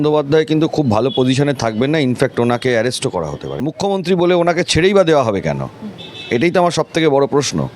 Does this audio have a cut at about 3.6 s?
yes; 1 cut; at 3.6 s

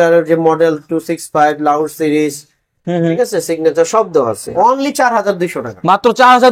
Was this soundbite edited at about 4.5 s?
yes; 1 cut; at 4.5 s

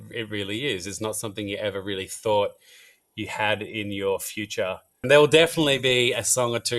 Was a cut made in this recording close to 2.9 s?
no; 1 cut; at 5.0 s

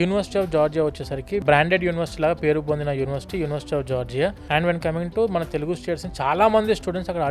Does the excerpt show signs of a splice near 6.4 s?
no; 2 cuts; at 1.4 s, 4.4 s

